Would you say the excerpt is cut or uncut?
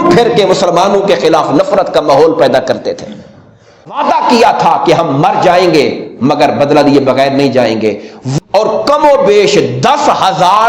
cut